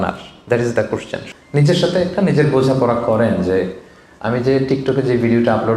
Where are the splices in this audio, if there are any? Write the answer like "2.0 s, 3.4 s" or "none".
1.2 s